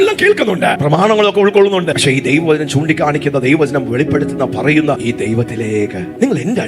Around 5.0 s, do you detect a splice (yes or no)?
yes